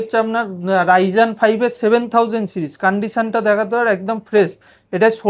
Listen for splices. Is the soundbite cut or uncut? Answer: uncut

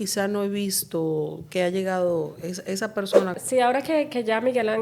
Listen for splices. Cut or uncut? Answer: cut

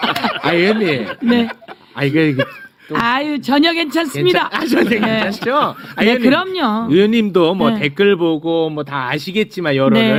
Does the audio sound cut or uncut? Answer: uncut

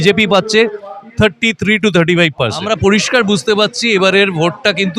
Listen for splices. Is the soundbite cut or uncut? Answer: cut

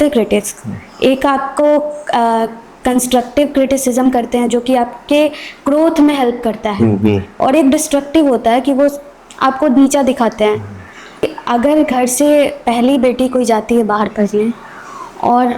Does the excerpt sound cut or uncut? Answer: cut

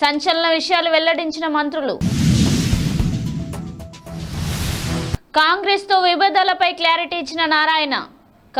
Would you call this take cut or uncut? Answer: uncut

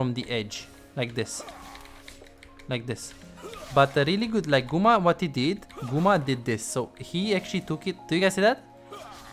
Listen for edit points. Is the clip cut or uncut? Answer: uncut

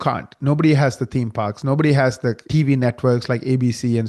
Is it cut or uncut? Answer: cut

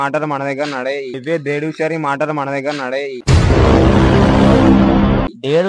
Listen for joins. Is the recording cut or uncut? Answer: uncut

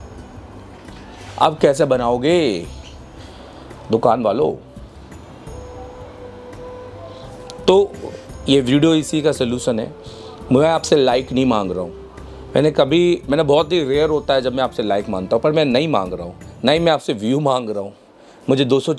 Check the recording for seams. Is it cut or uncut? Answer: uncut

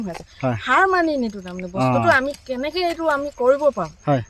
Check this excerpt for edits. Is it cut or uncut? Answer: uncut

